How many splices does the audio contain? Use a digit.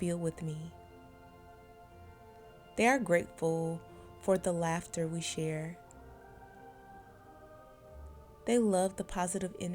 2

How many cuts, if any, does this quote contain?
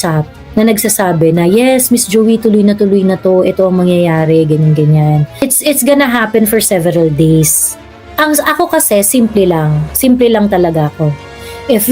1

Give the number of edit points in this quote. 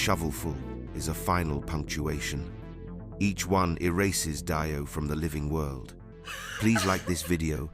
1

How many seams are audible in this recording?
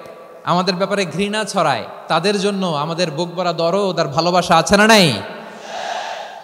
0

